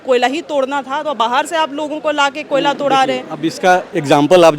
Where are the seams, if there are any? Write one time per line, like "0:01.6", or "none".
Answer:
none